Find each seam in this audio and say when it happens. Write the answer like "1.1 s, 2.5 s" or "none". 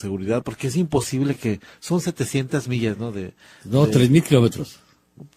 1.7 s